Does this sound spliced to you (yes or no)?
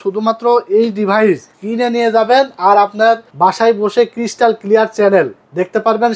yes